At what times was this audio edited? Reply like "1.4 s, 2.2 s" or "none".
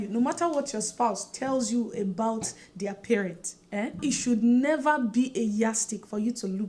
4.0 s